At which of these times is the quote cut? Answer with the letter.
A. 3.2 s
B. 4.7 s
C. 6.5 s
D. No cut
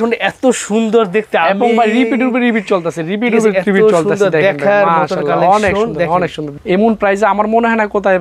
C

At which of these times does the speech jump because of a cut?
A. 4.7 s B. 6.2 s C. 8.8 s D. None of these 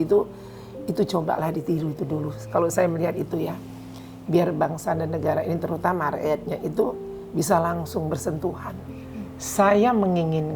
C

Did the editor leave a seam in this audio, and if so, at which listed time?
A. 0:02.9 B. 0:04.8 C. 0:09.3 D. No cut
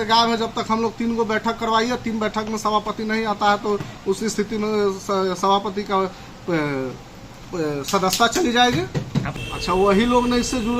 C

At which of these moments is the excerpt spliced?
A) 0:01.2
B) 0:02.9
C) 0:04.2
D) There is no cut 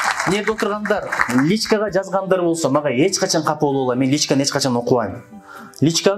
D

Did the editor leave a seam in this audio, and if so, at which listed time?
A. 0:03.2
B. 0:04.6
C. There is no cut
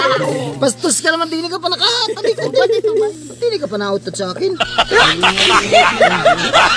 B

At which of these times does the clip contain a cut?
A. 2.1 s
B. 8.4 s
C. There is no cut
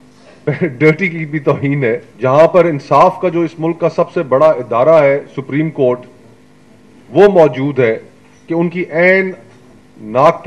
A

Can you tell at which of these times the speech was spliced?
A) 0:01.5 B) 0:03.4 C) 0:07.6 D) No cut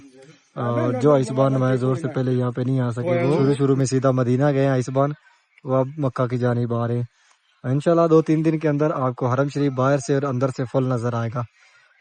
B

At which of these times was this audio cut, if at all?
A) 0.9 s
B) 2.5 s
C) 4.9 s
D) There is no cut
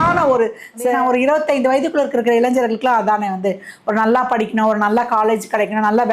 A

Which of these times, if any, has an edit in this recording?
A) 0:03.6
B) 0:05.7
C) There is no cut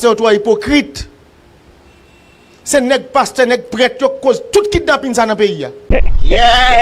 B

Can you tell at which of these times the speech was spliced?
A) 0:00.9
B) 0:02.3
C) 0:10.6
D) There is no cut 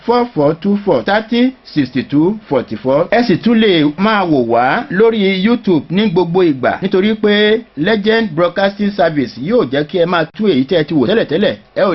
A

